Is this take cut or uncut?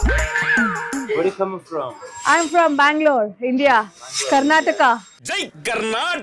uncut